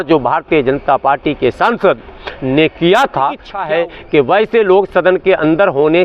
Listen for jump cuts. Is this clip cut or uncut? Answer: cut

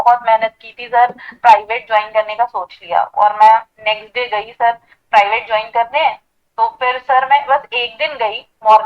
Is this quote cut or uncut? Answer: cut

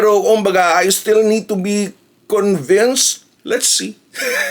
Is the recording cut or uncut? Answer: cut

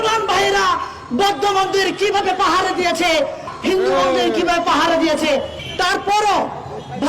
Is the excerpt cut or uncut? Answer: cut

